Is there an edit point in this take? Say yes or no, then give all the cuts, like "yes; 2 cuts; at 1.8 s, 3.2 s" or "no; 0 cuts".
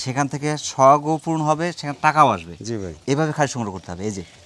no; 0 cuts